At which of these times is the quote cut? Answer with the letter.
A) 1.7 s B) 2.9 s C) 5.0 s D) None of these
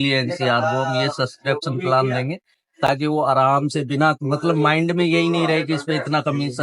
D